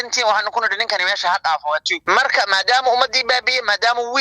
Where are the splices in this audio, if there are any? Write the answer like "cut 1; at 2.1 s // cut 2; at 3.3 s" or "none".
cut 1; at 1.9 s